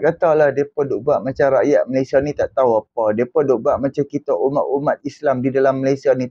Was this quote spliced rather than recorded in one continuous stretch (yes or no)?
no